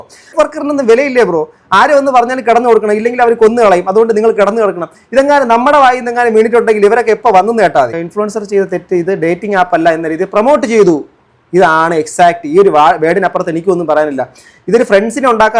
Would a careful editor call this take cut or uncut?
cut